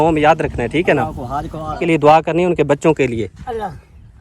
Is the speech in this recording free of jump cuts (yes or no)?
no